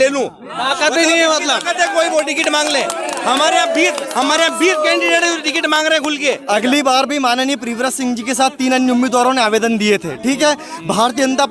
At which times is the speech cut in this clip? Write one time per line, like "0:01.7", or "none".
0:06.4